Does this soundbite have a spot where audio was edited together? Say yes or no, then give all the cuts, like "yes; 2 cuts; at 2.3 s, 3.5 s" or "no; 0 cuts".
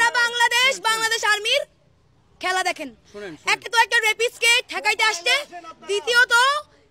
no; 0 cuts